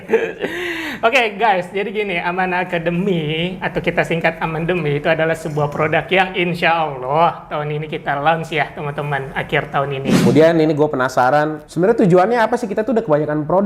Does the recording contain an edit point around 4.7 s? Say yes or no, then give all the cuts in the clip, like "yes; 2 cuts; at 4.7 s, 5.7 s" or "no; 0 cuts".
no; 2 cuts; at 10.1 s, 11.6 s